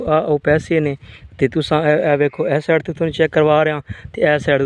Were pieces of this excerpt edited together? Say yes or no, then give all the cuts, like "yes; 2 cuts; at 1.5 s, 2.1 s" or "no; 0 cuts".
no; 0 cuts